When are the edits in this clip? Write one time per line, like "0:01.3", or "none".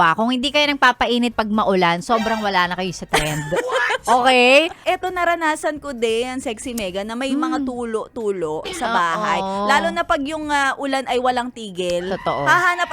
0:04.8